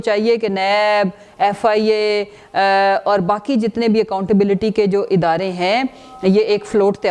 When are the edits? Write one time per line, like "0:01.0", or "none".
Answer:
none